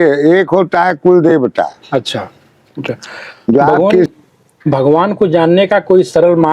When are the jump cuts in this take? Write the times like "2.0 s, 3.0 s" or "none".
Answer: 4.1 s